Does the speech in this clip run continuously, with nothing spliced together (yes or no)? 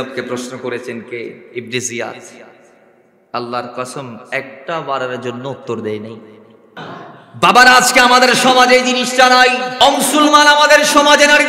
no